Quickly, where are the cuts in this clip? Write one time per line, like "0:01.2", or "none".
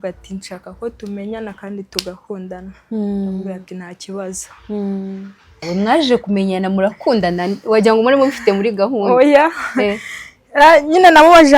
0:05.6